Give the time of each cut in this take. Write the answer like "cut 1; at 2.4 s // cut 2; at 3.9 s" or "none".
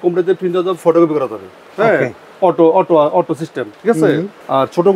none